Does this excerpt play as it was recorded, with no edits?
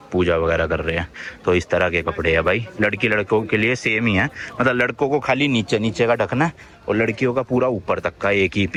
yes; 0 cuts

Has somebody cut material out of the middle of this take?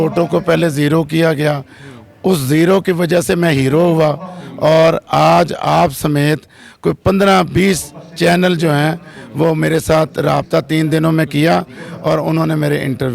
no; 0 cuts

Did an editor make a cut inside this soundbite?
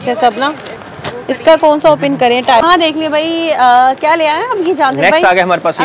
yes; 1 cut; at 2.6 s

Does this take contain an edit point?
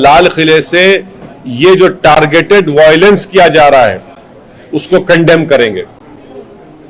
no; 0 cuts

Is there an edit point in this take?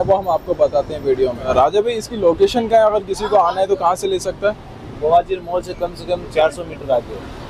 no; 0 cuts

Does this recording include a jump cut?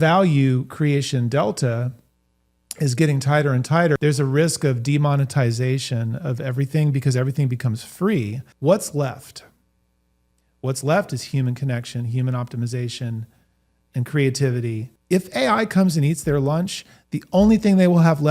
yes; 3 cuts; at 4.0 s, 8.4 s, 14.9 s

